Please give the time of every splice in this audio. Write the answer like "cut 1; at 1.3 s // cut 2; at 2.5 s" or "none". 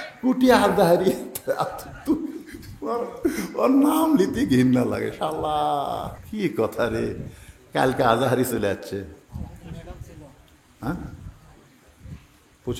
cut 1; at 6.2 s

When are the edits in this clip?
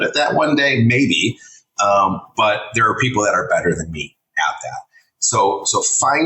none

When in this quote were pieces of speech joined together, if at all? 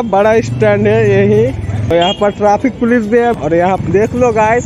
cut 1; at 1.9 s // cut 2; at 3.8 s

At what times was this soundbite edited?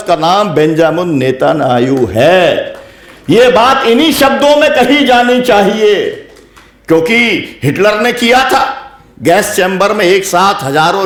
none

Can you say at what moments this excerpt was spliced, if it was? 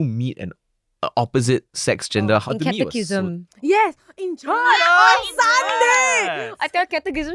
cut 1; at 2.4 s // cut 2; at 6.5 s

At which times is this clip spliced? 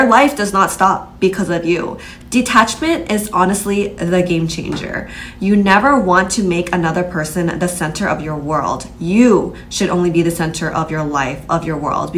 cut 1; at 2.1 s

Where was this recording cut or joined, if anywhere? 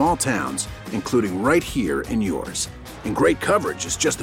none

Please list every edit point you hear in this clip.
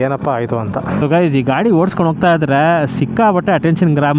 cut 1; at 1.0 s

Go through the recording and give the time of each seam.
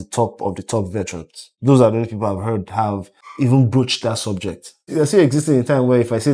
cut 1; at 1.5 s // cut 2; at 3.2 s // cut 3; at 4.9 s

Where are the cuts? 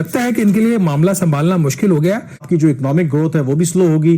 cut 1; at 2.4 s

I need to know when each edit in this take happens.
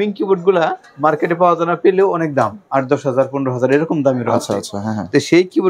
none

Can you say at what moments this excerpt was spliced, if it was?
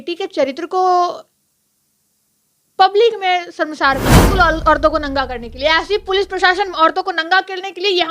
cut 1; at 4.2 s

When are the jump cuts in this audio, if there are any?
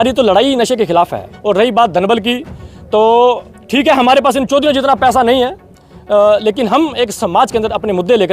cut 1; at 1.3 s

